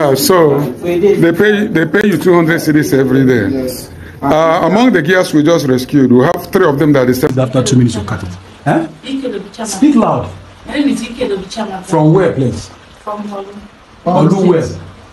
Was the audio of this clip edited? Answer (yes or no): yes